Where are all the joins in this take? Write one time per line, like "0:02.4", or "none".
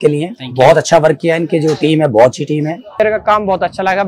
0:03.0